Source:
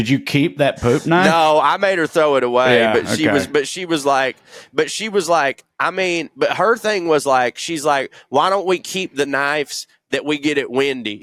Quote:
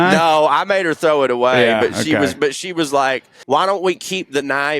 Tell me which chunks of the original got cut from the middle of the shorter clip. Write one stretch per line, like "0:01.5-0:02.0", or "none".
0:04.5-0:08.2